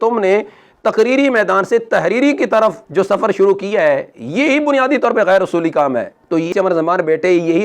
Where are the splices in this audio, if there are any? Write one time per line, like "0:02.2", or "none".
0:06.5